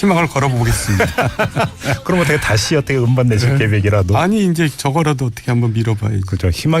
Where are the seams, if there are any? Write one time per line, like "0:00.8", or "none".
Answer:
0:03.9

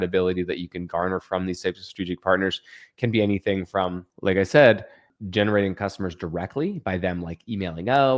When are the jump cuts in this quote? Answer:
0:04.1
0:05.1

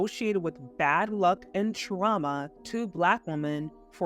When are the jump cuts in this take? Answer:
0:02.6

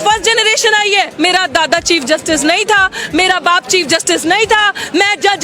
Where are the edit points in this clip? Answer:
0:01.1

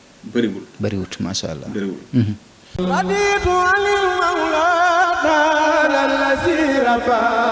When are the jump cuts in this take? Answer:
0:02.8

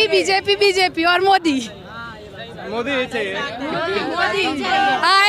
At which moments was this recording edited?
none

